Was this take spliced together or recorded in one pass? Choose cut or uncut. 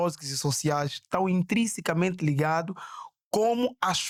uncut